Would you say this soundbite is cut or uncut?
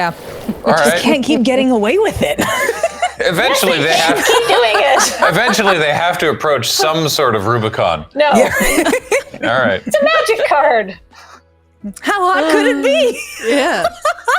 uncut